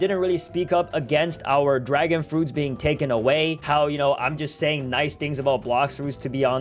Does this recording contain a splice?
yes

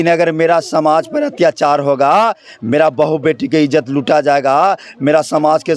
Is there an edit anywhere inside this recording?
no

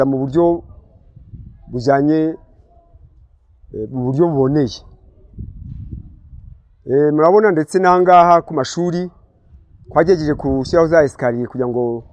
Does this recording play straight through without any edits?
yes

